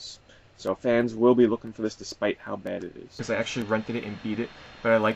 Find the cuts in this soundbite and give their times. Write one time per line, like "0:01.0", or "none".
0:03.2